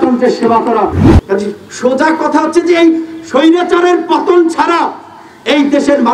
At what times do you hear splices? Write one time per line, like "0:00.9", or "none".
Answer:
0:01.1